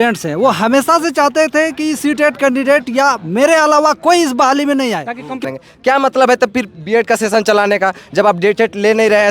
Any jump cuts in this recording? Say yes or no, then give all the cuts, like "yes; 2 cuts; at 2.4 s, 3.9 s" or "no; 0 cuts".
yes; 1 cut; at 5.4 s